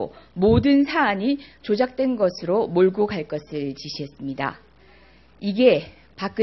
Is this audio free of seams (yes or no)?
yes